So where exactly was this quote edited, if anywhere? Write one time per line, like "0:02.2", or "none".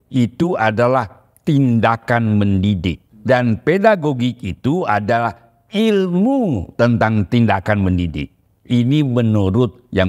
0:03.1